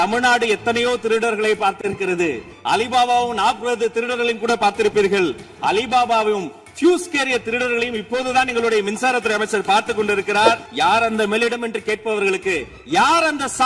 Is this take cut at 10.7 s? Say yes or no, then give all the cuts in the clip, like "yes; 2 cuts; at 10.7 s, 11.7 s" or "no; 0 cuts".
yes; 1 cut; at 10.7 s